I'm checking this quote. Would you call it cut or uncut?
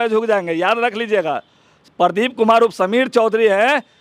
uncut